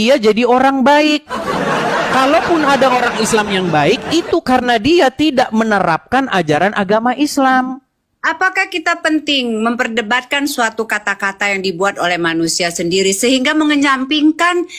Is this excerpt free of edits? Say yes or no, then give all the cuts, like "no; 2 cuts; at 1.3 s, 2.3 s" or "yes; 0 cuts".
yes; 0 cuts